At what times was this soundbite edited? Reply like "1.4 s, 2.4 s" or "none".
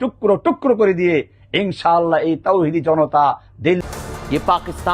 3.8 s